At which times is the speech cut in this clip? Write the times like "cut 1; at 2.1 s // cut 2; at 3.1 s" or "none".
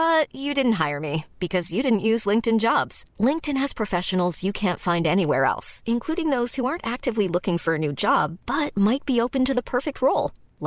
none